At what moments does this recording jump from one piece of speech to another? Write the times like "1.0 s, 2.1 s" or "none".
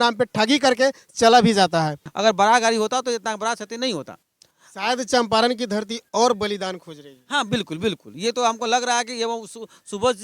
2.0 s